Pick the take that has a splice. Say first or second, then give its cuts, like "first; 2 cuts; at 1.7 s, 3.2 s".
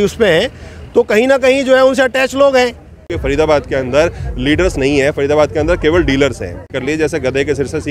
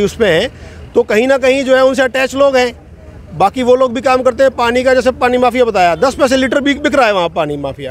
first; 2 cuts; at 3.2 s, 6.7 s